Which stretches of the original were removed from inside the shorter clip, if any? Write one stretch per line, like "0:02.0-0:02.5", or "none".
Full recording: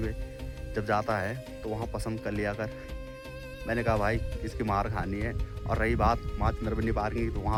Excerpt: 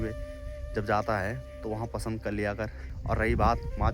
0:02.9-0:05.5